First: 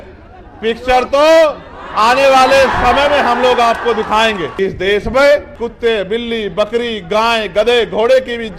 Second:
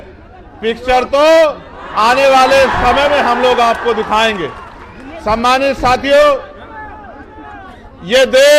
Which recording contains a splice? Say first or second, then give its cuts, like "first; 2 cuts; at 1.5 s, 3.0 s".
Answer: first; 2 cuts; at 4.5 s, 5.6 s